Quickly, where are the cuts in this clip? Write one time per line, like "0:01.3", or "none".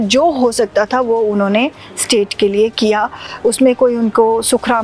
none